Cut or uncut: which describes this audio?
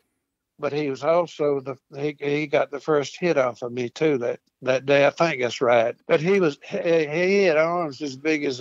cut